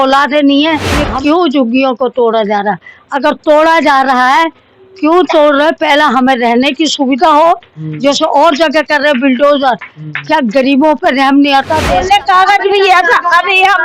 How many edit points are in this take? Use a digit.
2